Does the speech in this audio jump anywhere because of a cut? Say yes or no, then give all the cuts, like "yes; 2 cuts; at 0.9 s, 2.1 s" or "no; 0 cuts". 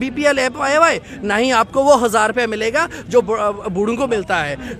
no; 0 cuts